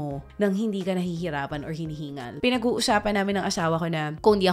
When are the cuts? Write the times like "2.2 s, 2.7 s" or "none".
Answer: 2.4 s